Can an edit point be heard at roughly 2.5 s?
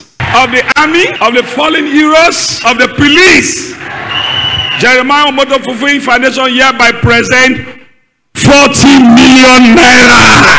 yes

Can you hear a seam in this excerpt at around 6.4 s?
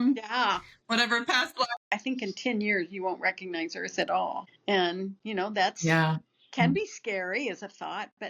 no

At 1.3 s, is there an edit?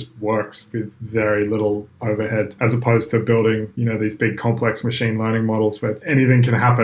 no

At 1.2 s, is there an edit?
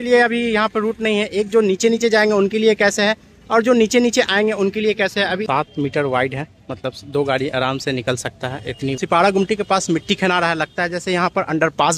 no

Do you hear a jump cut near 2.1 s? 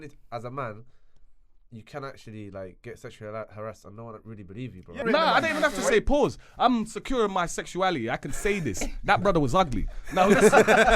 no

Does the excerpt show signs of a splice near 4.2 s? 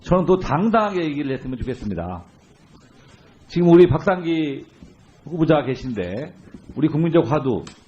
yes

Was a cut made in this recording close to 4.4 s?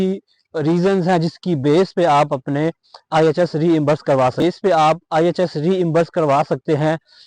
yes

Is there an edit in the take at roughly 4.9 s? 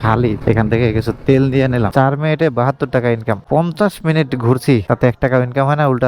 no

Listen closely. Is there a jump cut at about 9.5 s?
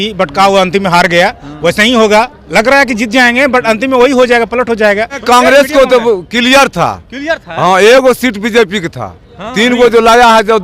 no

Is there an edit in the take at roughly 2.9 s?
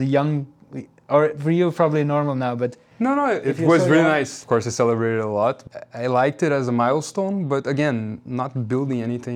no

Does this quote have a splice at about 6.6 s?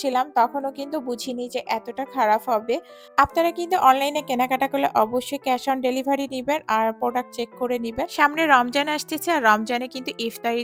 no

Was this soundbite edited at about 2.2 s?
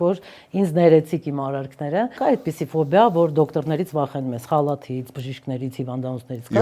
yes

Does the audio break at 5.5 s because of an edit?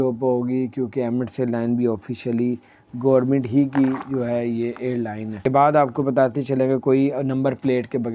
yes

